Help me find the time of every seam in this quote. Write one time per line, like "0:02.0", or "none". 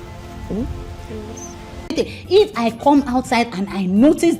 0:01.9